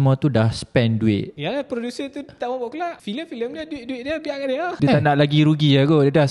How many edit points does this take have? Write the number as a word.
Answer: three